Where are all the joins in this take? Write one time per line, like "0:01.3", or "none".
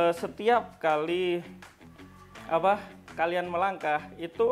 none